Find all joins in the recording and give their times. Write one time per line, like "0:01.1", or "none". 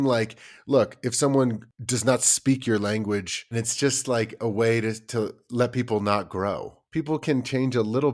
0:01.7
0:03.5
0:06.8